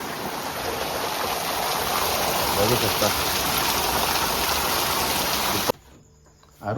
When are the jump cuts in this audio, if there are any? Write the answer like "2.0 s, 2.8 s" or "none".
5.7 s